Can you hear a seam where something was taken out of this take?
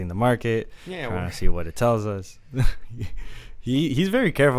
no; 0 cuts

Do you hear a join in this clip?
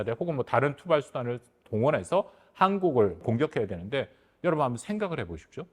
yes; 1 cut; at 3.2 s

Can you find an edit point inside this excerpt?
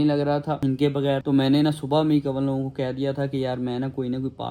no; 0 cuts

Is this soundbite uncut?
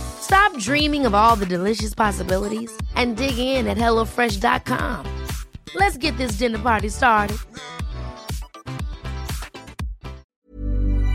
no; 1 cut; at 10.2 s

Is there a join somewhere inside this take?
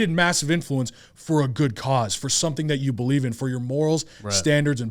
no; 0 cuts

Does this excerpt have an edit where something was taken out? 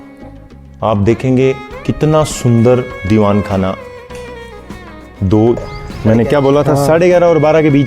yes; 1 cut; at 5.6 s

